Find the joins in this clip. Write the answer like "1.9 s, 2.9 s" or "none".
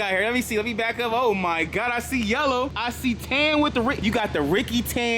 2.8 s, 4.0 s